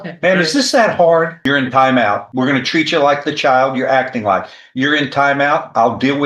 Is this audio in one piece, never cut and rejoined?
no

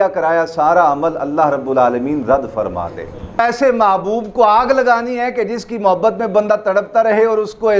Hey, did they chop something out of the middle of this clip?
yes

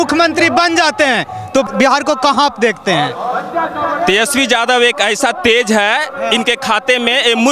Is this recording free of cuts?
no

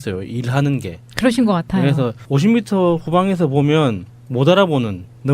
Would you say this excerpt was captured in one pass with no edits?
no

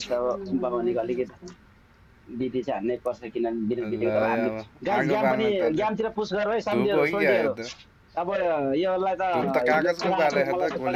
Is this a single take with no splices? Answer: yes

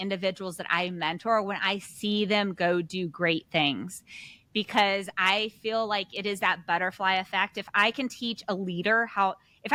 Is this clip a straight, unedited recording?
yes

